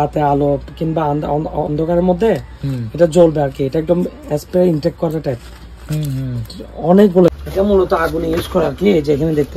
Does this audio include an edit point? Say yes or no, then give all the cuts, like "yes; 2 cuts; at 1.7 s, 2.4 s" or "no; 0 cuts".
yes; 1 cut; at 7.3 s